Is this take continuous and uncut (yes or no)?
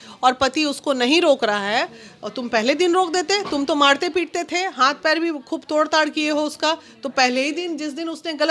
yes